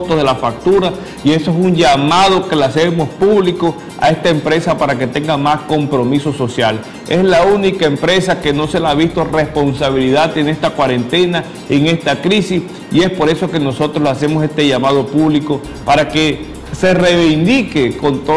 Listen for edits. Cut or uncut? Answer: uncut